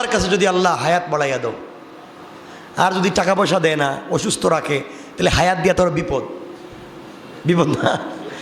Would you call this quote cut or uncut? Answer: uncut